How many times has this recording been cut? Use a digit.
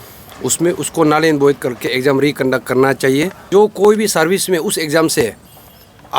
1